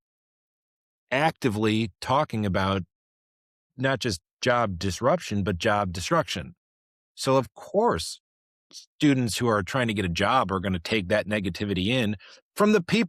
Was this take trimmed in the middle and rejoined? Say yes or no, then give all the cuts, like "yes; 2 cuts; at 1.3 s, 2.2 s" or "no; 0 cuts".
no; 0 cuts